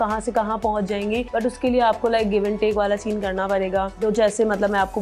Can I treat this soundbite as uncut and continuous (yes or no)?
no